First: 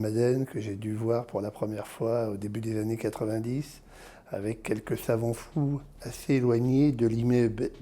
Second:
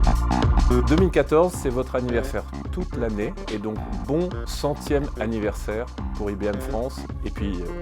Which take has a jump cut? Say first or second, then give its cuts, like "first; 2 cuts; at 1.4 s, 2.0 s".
first; 1 cut; at 5.0 s